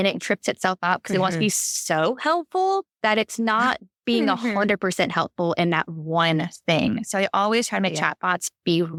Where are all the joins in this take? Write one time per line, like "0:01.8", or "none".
none